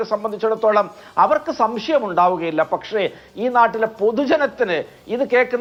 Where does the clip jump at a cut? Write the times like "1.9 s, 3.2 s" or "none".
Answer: none